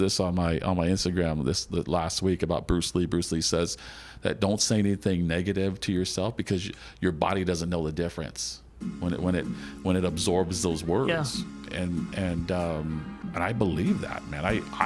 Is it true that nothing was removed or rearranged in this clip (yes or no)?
yes